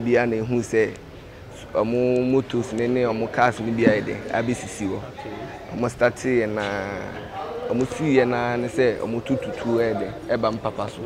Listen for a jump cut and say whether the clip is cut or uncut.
uncut